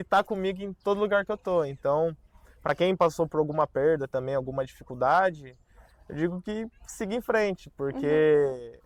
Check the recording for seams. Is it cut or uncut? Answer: uncut